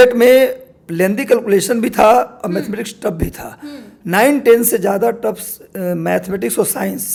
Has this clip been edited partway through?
no; 0 cuts

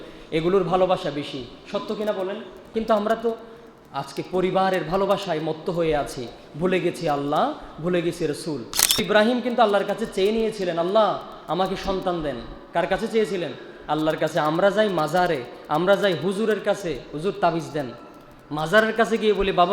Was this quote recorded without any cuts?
no; 2 cuts; at 2.6 s, 9.0 s

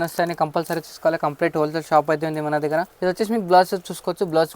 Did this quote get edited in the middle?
yes; 1 cut; at 2.9 s

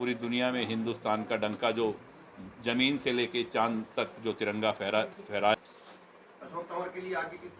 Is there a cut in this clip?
yes; 1 cut; at 5.5 s

